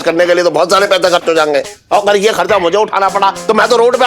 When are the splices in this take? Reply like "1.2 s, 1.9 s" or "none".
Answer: 1.8 s